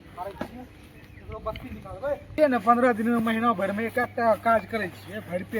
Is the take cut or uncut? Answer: cut